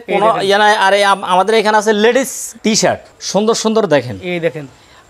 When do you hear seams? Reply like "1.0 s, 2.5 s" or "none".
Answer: 2.8 s

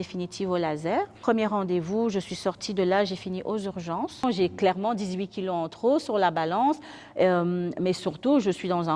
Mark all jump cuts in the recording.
1.2 s, 4.2 s

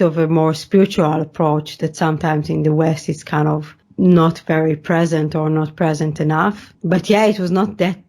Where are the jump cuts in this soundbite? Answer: 3.8 s, 6.7 s

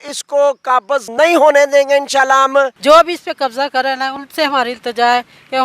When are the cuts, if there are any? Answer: 1.1 s, 2.8 s

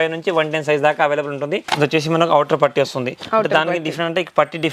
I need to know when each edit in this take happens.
1.7 s

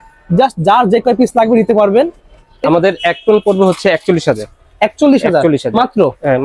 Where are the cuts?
2.6 s

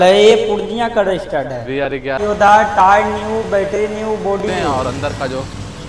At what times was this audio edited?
2.2 s, 4.6 s

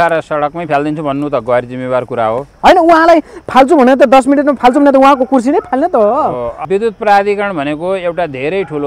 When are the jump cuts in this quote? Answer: 6.5 s

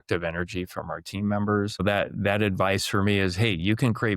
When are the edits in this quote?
1.8 s

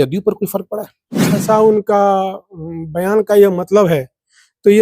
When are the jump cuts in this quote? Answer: 1.4 s

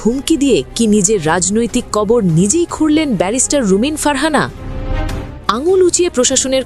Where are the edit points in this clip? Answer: none

